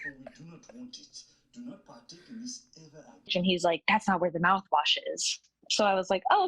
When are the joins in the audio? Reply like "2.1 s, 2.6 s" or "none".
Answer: 3.3 s